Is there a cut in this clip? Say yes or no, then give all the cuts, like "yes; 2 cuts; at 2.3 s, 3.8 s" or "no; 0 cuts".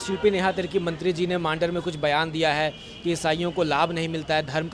no; 0 cuts